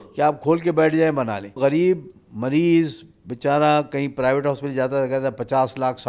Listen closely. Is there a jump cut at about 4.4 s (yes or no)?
no